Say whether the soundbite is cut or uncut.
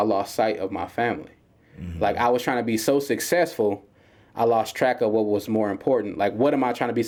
uncut